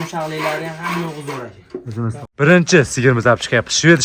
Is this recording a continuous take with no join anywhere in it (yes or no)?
no